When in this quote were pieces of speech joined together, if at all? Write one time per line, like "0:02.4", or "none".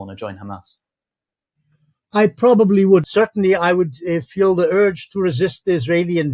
0:03.0